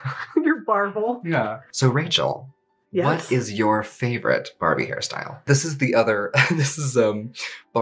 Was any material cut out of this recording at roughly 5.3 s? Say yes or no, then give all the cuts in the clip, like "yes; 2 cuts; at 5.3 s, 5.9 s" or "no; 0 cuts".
yes; 2 cuts; at 1.6 s, 5.3 s